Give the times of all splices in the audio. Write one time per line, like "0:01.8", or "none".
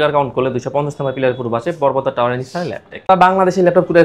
0:03.1

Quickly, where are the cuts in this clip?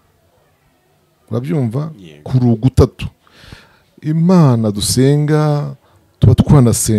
none

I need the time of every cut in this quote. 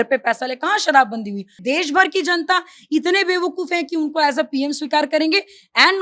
0:01.6

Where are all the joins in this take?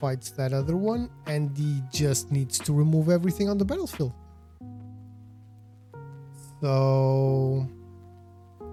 none

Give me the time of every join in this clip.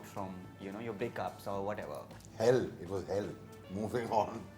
0:02.2

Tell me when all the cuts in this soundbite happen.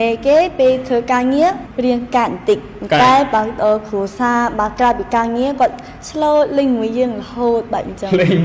0:01.7

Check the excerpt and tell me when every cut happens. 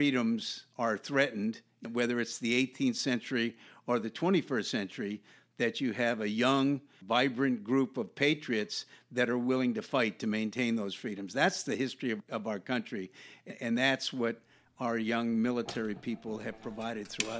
0:06.9

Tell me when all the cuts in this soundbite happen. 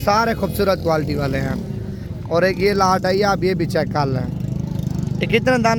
none

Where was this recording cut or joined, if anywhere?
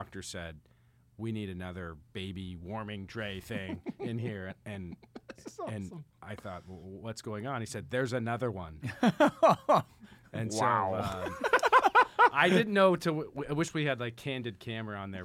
none

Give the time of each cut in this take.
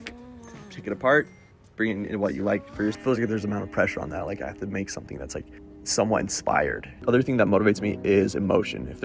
0:03.0
0:05.6
0:07.0

